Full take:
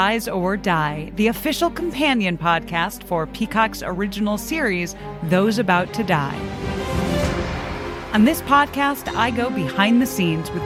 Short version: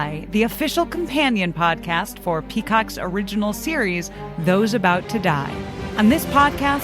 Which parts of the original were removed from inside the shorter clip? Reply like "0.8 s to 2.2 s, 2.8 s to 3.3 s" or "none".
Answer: 6.6 s to 8.0 s

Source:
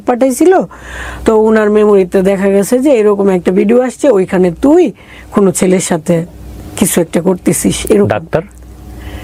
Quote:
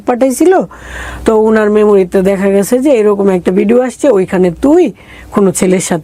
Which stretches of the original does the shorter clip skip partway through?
none

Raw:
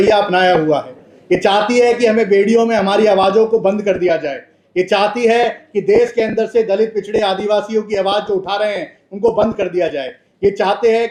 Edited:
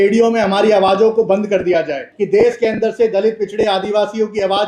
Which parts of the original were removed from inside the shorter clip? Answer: 4.5 s to 5.7 s

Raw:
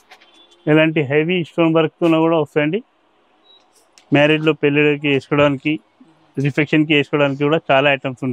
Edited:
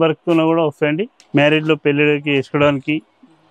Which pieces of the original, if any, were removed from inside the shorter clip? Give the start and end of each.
2.9 s to 3.9 s

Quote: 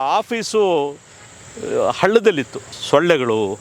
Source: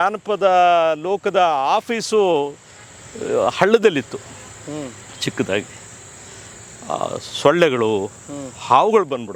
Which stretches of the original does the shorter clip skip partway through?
4.3 s to 7.2 s

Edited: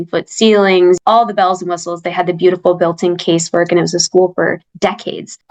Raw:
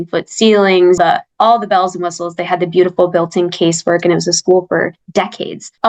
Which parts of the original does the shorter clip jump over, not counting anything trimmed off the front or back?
1.0 s to 1.3 s

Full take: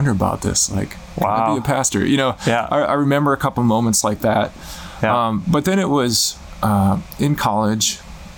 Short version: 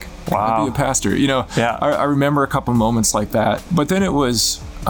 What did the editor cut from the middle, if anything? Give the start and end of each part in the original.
4.6 s to 5.4 s

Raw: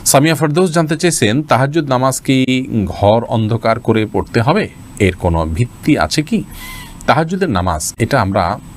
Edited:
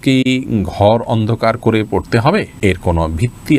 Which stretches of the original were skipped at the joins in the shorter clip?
4.7 s to 4.9 s

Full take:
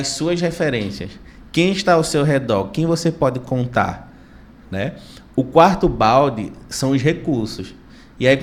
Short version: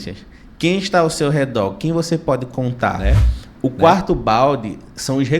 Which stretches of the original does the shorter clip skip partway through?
3.9 s to 4.7 s

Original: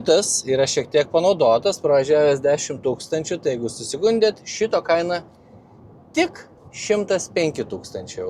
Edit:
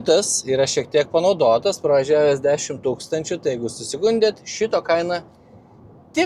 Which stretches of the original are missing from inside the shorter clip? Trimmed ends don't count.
none

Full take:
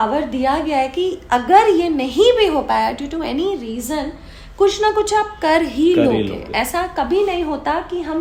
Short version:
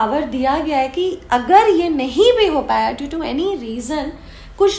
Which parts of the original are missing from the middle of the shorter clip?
none

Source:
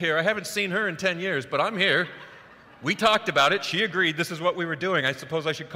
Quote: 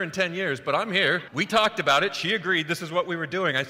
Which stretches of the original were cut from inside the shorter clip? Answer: 2.1 s to 2.8 s

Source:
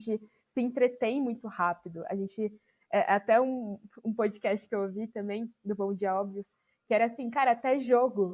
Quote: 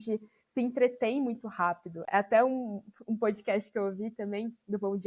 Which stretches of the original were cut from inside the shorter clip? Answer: 2.1 s to 3.1 s

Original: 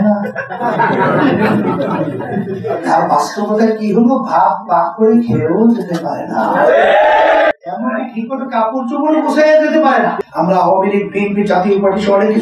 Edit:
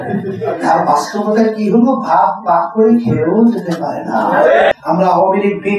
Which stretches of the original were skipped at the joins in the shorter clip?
6.9 s to 10.2 s

